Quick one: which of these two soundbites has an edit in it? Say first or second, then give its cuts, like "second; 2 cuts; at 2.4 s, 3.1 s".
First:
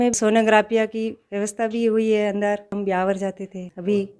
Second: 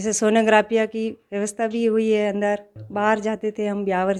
first; 1 cut; at 2.7 s